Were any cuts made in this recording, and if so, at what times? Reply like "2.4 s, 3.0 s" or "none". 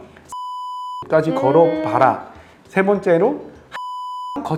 none